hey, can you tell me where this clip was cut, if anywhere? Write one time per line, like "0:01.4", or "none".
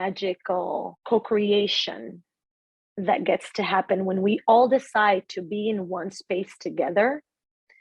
0:01.0